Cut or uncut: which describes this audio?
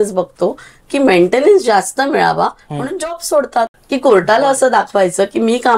cut